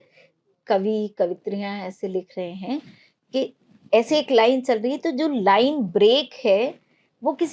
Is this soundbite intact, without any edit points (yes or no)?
yes